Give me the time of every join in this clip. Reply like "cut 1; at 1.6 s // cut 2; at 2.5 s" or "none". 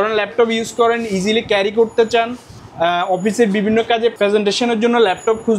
cut 1; at 4.1 s